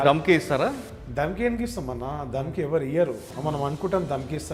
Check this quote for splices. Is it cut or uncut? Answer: uncut